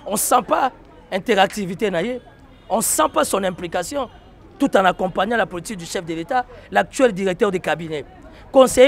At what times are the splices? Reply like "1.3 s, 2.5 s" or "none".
none